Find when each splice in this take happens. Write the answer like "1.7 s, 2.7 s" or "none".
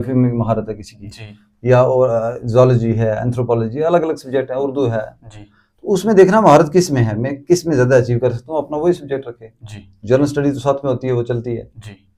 none